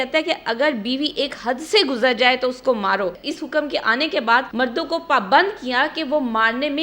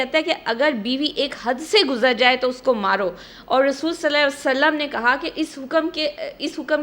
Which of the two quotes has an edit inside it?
first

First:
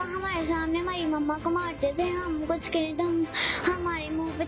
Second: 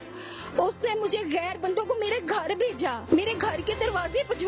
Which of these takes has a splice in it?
second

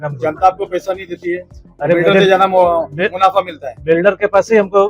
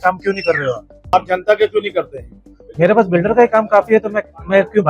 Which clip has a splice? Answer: second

